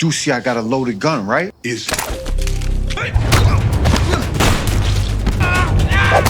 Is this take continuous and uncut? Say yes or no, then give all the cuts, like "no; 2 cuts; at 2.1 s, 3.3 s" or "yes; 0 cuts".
no; 2 cuts; at 4.3 s, 5.4 s